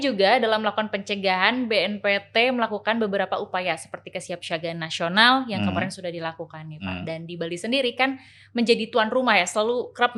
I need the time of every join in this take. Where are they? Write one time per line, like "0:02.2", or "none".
none